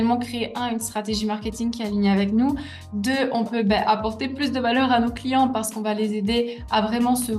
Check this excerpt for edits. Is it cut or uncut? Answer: uncut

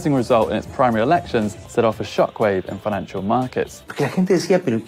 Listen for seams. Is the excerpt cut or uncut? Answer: cut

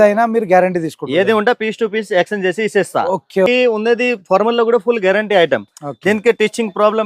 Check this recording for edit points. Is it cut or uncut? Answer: cut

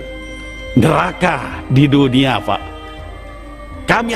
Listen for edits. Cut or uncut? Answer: uncut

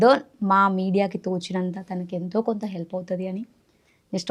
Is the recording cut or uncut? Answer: uncut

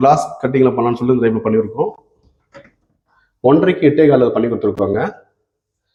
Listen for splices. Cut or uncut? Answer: uncut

